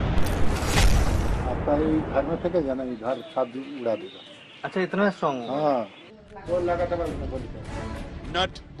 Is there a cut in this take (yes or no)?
no